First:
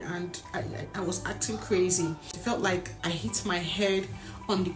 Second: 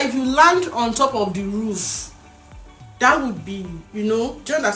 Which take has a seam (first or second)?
first